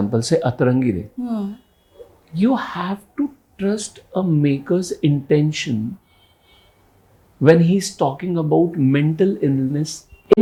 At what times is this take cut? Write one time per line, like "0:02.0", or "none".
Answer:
none